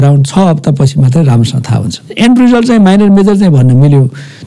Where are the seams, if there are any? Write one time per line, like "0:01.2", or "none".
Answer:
0:02.0